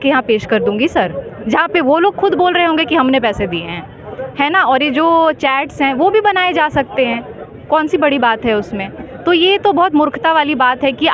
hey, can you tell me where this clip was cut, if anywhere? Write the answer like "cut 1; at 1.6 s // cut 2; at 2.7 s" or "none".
none